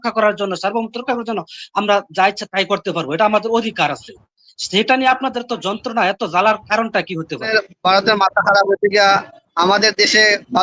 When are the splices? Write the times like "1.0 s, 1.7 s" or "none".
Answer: 7.5 s